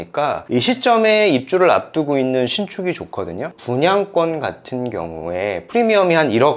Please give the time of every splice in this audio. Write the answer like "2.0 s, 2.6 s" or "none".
3.6 s